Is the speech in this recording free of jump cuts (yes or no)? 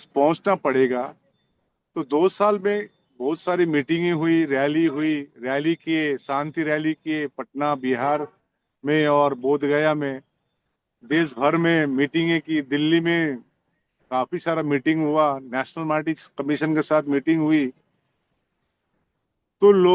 yes